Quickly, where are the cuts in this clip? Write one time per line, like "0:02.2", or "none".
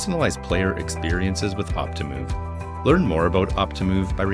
none